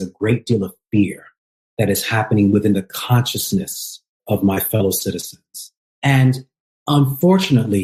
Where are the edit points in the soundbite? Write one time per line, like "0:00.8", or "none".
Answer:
0:04.2